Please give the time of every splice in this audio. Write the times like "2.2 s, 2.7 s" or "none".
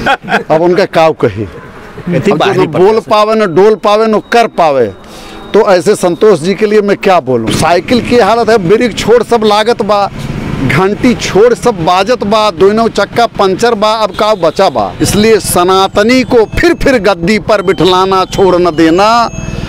2.1 s, 7.5 s, 15.0 s

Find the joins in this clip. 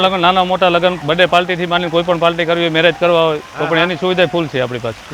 none

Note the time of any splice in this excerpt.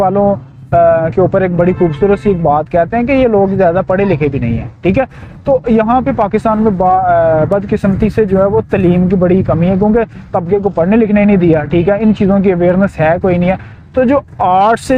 none

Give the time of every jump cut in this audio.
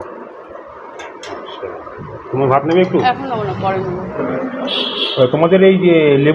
4.3 s

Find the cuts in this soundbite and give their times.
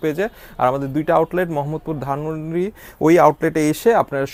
none

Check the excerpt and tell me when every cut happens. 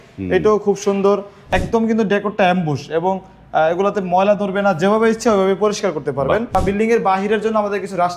1.4 s, 6.6 s

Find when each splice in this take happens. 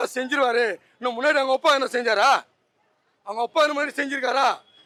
none

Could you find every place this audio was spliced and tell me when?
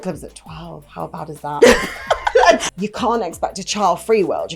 2.6 s

